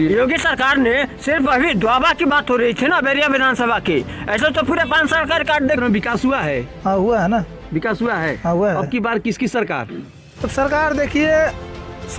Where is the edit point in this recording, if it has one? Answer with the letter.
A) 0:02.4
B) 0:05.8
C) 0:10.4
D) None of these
B